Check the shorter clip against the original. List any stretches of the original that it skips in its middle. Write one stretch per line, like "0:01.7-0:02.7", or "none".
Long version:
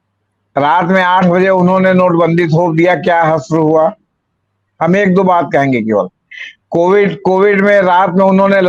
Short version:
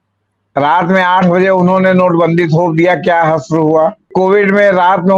0:04.1-0:07.2